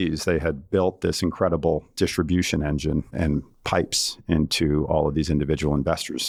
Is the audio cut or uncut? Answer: uncut